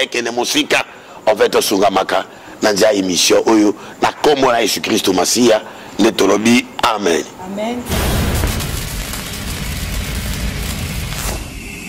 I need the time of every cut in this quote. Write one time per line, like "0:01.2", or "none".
0:07.9